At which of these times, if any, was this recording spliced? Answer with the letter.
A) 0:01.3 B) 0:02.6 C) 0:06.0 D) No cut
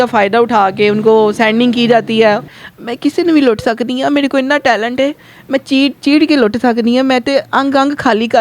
B